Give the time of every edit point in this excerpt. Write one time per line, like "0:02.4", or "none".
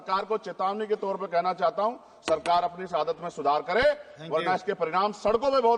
none